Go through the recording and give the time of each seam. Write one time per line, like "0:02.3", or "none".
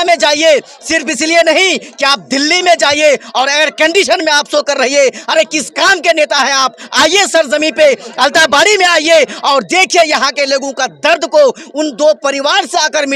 none

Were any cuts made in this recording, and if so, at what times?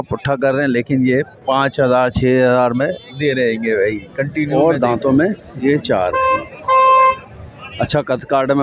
0:04.4

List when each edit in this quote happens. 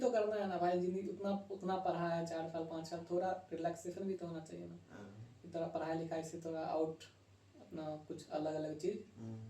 none

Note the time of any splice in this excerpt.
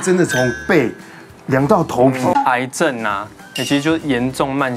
0:02.3

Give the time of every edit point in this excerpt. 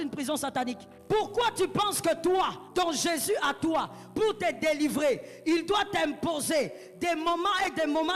0:00.9
0:02.6

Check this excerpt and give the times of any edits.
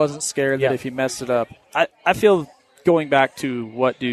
0:01.6

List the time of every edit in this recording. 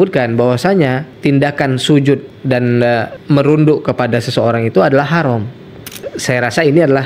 0:01.1
0:02.7
0:05.9

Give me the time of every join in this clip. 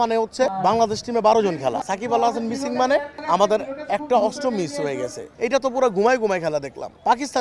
0:01.8
0:05.2

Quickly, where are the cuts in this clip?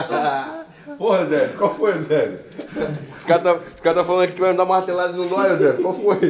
none

